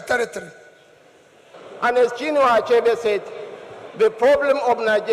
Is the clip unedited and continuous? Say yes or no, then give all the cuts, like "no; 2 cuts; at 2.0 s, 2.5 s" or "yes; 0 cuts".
no; 1 cut; at 1.6 s